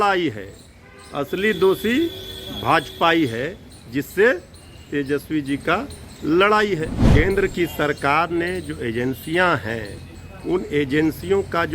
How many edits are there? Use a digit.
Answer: 1